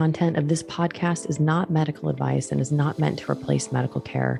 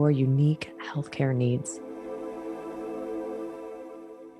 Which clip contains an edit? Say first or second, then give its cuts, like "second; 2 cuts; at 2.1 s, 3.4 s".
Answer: second; 1 cut; at 1.7 s